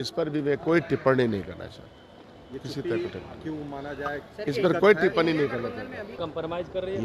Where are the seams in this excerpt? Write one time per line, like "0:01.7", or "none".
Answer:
0:06.1